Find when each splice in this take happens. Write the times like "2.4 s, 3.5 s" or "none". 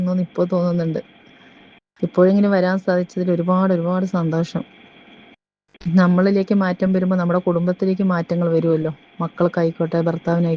none